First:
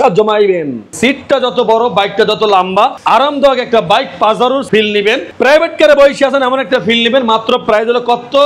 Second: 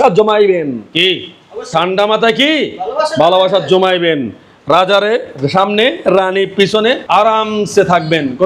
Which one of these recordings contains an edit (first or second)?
first